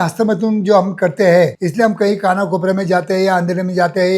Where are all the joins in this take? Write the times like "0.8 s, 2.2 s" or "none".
1.6 s